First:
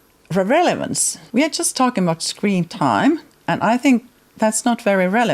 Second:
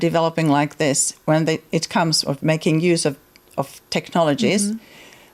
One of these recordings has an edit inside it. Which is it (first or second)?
first